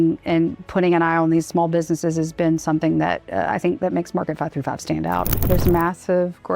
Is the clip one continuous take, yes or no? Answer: no